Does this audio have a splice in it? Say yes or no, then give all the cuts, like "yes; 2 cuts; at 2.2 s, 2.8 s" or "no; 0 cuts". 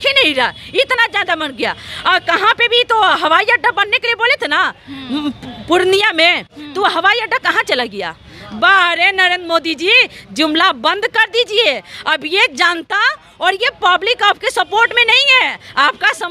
no; 0 cuts